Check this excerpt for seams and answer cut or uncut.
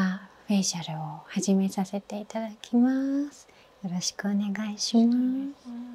uncut